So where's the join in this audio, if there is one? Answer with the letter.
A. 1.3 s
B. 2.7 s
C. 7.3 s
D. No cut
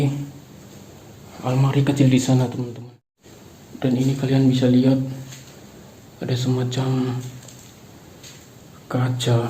B